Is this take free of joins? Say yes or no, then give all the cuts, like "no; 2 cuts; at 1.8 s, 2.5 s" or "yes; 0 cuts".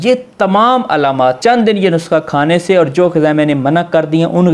no; 1 cut; at 1.4 s